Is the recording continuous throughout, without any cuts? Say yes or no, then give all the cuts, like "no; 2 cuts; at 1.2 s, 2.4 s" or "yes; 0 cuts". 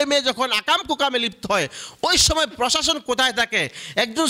yes; 0 cuts